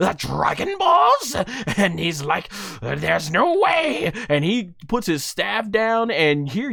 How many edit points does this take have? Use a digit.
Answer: 0